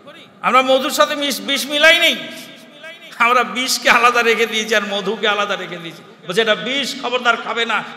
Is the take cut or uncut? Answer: uncut